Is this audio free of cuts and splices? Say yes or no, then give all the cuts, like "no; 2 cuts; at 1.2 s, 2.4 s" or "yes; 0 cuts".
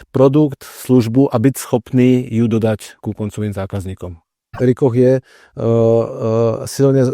no; 1 cut; at 4.6 s